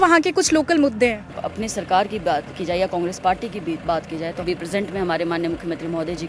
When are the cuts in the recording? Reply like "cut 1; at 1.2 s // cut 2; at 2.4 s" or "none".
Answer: cut 1; at 1.5 s // cut 2; at 4.4 s